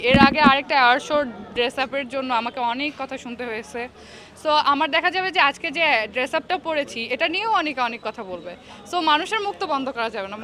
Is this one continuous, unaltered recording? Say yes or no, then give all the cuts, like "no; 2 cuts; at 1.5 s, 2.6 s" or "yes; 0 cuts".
yes; 0 cuts